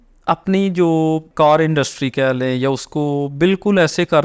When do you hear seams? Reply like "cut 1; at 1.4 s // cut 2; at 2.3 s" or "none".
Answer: cut 1; at 1.3 s